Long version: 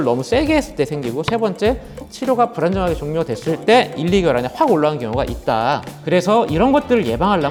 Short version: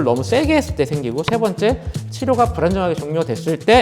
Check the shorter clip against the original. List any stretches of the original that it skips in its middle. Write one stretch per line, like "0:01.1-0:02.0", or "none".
none